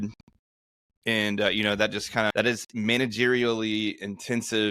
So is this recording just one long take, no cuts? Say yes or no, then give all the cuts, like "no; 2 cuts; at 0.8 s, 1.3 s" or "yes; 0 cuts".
no; 1 cut; at 2.3 s